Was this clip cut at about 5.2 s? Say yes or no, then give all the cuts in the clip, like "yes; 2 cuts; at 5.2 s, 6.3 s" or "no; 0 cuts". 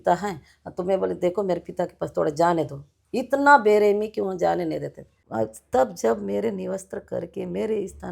yes; 1 cut; at 5.2 s